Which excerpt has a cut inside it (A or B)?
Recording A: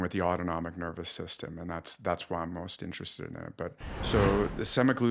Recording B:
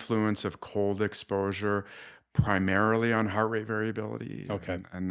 A